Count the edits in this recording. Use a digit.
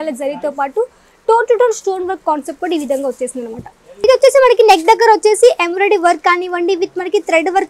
1